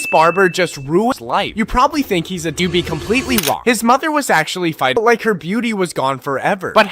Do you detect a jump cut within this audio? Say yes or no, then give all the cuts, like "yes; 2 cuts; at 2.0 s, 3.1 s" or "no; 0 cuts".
yes; 3 cuts; at 1.1 s, 2.6 s, 5.0 s